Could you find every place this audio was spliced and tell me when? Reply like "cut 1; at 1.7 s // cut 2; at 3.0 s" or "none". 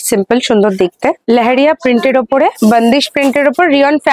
cut 1; at 1.2 s // cut 2; at 2.5 s